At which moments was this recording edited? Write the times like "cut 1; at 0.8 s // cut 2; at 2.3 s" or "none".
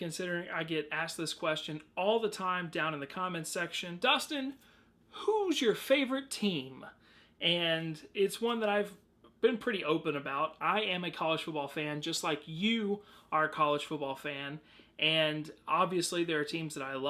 cut 1; at 1.6 s // cut 2; at 13.8 s